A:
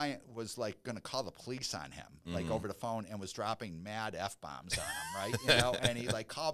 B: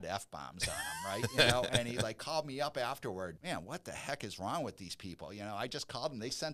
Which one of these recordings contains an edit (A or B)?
B